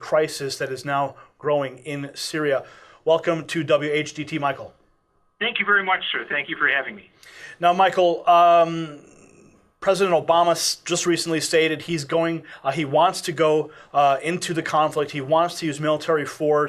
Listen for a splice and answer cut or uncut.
cut